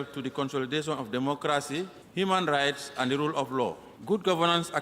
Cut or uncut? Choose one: cut